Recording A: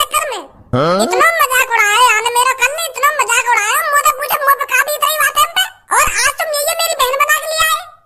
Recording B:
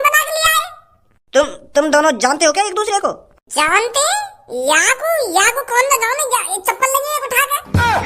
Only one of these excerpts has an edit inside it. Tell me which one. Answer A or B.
A